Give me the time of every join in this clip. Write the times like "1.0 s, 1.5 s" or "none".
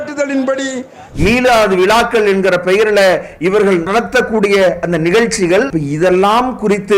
1.0 s, 5.7 s